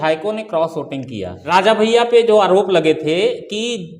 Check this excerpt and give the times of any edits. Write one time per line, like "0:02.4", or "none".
0:01.7